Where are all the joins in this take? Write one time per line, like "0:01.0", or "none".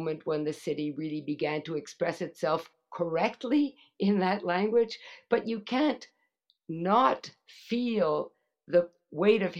none